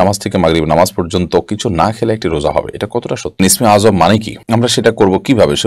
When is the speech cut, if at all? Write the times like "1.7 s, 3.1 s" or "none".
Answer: 3.4 s, 4.3 s